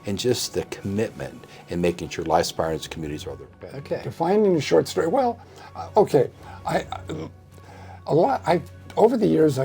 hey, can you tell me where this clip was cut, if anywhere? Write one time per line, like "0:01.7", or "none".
0:03.5